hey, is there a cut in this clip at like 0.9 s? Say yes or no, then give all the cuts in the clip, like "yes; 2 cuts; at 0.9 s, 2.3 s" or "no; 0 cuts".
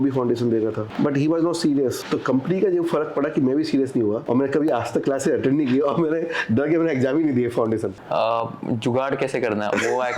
yes; 4 cuts; at 0.9 s, 2.0 s, 4.2 s, 8.0 s